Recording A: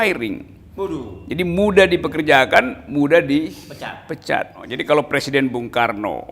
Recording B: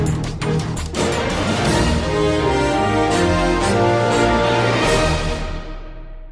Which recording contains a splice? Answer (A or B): A